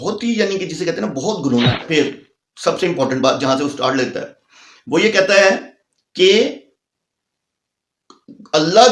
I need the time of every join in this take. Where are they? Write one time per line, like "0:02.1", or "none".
0:01.9